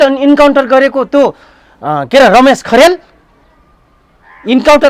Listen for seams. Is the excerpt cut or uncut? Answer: uncut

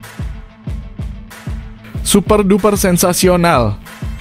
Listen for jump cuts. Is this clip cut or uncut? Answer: cut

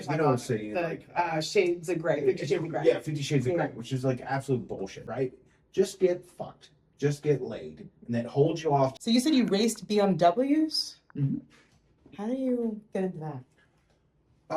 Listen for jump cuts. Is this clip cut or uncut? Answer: cut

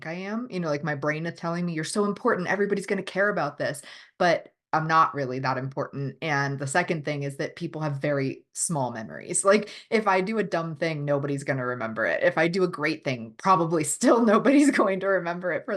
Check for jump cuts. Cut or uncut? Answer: uncut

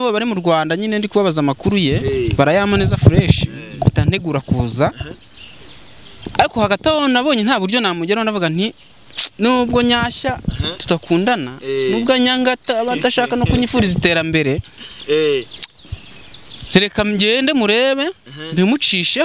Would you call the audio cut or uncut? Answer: uncut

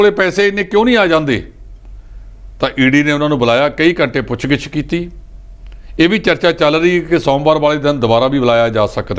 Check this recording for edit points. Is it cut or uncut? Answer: uncut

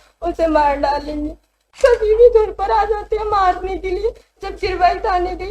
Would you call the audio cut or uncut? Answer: cut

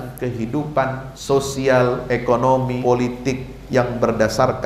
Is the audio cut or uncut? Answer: cut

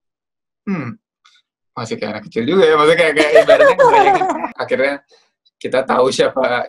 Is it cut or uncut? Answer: cut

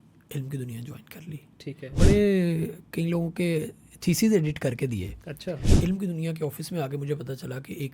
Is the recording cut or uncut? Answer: cut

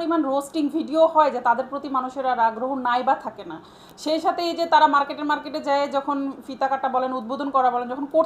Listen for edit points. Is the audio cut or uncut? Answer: uncut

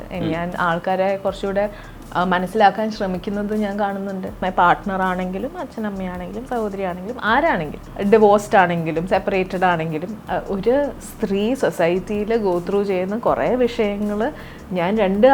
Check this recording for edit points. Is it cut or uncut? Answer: cut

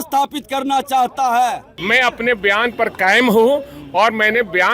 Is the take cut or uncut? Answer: cut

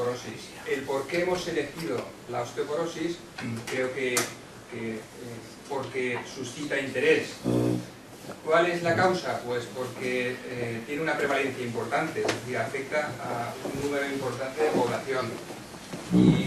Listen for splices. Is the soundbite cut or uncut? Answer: uncut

